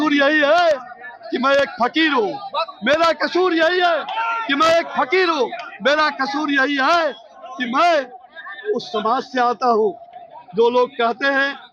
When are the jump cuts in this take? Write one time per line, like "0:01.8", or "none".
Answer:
none

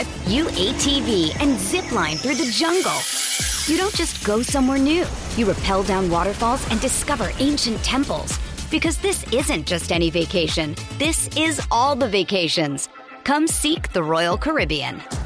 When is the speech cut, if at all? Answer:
none

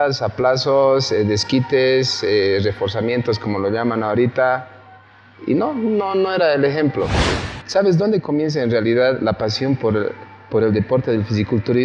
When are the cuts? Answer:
0:07.3

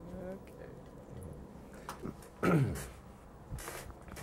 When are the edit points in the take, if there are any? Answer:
0:02.0

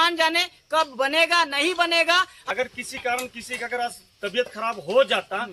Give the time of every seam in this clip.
0:02.4

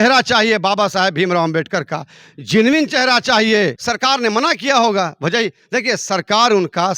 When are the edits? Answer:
0:03.8

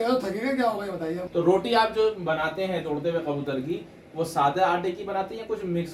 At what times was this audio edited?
0:01.2

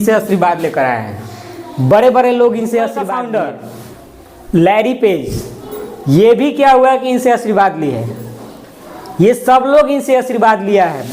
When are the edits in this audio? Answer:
0:03.0

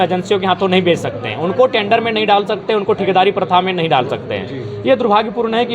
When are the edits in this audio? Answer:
none

